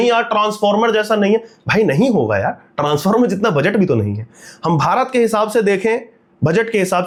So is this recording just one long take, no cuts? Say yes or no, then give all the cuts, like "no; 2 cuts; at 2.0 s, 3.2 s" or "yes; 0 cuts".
yes; 0 cuts